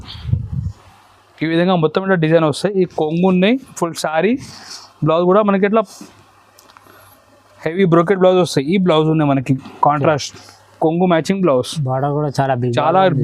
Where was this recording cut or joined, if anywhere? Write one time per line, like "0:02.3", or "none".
none